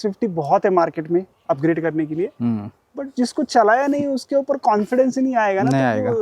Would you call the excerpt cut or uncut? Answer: uncut